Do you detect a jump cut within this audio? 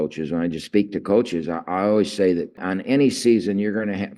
yes; 1 cut; at 2.6 s

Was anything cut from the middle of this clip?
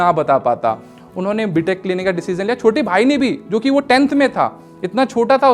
no; 0 cuts

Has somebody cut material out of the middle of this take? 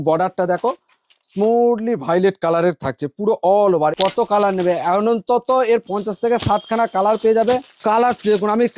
yes; 3 cuts; at 4.0 s, 5.9 s, 7.7 s

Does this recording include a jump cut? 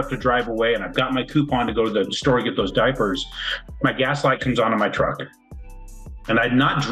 no; 0 cuts

